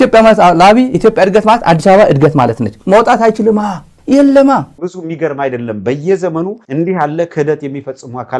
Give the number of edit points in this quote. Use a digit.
1